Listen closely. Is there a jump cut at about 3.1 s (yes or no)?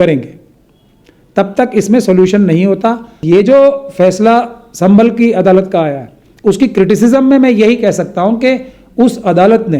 yes